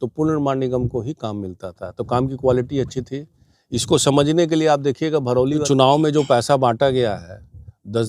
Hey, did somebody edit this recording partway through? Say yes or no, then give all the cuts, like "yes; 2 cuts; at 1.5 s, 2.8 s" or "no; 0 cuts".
yes; 1 cut; at 5.6 s